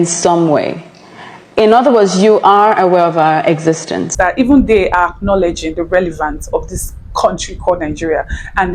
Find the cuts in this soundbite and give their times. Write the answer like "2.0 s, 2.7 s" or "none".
4.1 s